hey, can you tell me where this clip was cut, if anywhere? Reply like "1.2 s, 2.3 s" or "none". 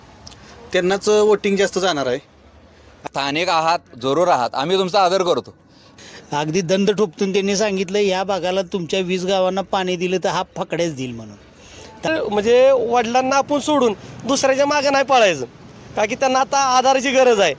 3.0 s, 5.9 s, 12.1 s